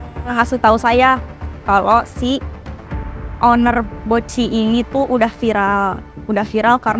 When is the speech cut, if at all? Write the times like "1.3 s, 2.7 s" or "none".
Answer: none